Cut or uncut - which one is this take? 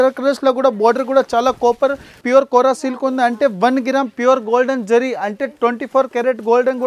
cut